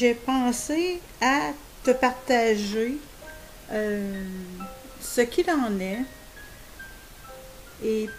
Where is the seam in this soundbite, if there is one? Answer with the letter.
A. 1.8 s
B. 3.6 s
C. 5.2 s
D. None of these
B